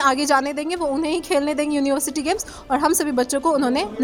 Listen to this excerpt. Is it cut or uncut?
uncut